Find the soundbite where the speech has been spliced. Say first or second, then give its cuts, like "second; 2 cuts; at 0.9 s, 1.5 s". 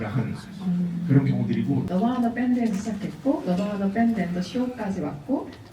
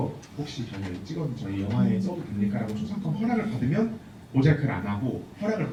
first; 1 cut; at 1.9 s